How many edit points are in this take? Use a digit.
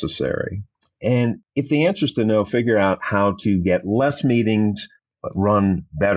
1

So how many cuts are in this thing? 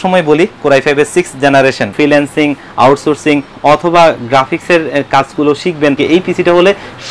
2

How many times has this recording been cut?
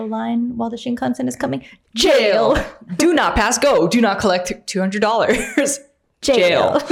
0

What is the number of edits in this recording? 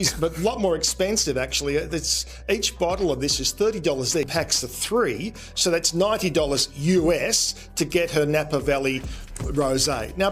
1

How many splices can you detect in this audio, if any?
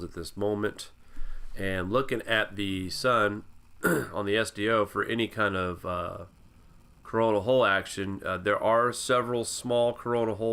0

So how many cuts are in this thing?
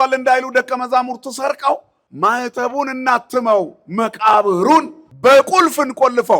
2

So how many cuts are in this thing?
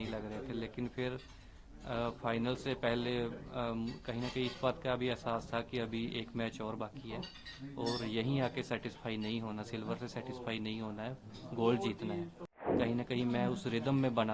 1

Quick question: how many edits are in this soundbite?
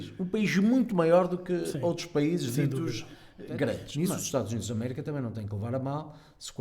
1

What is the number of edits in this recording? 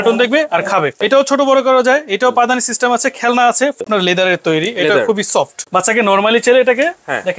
3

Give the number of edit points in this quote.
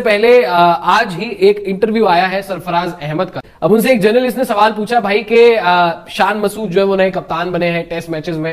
1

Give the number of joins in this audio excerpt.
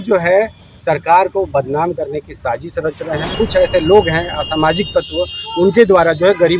1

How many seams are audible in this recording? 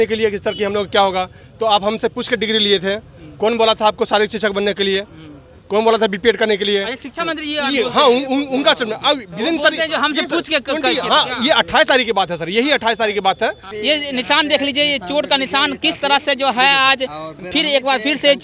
1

